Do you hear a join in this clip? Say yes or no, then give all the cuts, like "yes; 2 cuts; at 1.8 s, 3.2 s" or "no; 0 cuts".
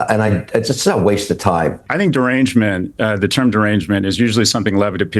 yes; 1 cut; at 1.8 s